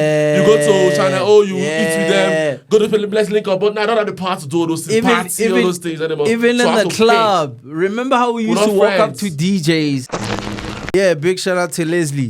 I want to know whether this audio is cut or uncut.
cut